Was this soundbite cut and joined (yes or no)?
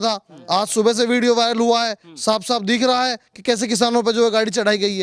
no